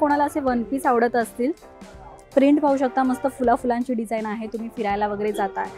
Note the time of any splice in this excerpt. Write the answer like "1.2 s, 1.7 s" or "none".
none